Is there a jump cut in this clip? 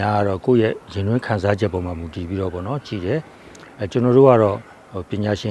no; 0 cuts

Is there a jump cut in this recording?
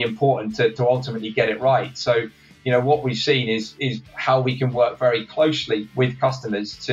no; 0 cuts

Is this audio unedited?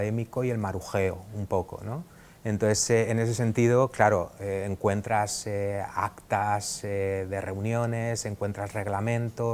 yes; 0 cuts

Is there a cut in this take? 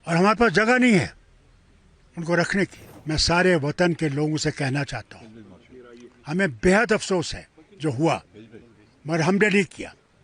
yes; 1 cut; at 2.9 s

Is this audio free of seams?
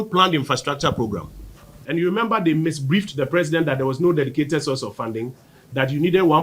no; 1 cut; at 1.8 s

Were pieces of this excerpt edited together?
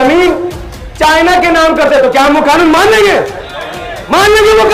no; 0 cuts

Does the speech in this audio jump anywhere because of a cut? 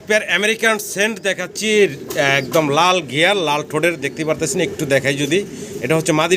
no; 0 cuts

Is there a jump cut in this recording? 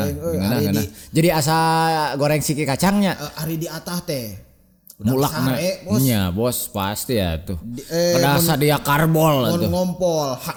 no; 0 cuts

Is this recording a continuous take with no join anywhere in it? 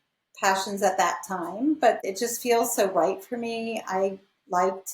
no; 1 cut; at 2.0 s

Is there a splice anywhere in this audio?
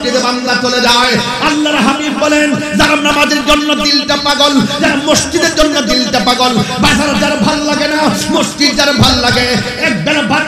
no; 0 cuts

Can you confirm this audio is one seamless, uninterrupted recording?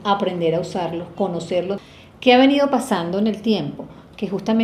no; 1 cut; at 1.8 s

